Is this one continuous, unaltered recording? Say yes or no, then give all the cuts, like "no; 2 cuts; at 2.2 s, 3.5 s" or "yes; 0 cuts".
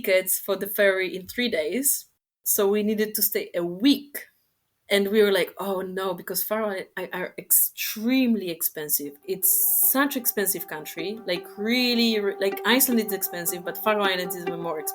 yes; 0 cuts